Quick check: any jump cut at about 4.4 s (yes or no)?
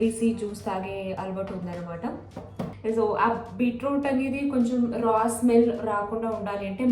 no